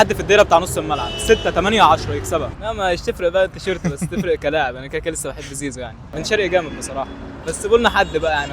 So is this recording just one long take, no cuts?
no; 2 cuts; at 2.5 s, 6.0 s

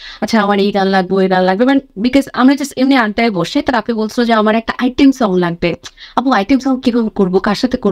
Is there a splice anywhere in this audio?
no; 0 cuts

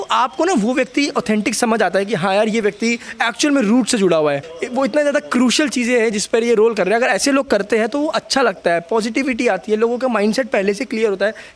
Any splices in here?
yes; 1 cut; at 4.5 s

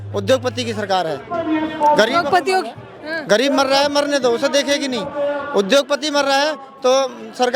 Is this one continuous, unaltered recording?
yes; 0 cuts

